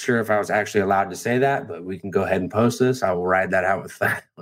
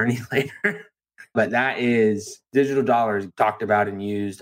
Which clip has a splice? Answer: second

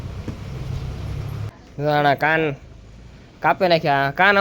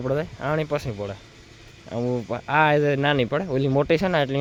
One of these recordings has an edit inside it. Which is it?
first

